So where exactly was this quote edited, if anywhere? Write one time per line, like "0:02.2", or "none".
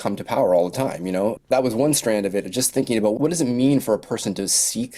0:01.4